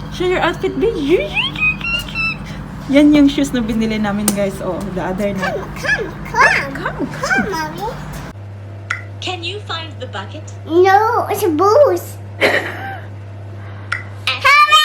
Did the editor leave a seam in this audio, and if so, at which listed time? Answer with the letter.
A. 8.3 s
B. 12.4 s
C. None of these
A